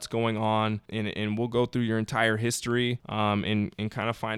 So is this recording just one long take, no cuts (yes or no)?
no